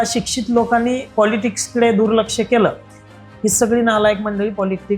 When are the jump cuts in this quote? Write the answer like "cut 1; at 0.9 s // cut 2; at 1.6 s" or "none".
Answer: cut 1; at 1.1 s